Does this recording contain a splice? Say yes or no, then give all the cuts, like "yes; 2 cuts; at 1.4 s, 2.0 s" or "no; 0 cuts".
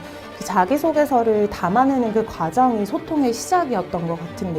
no; 0 cuts